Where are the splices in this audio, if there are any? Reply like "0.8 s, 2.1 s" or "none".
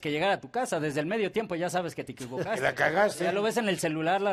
none